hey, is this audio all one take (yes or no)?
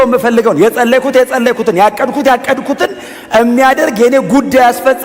yes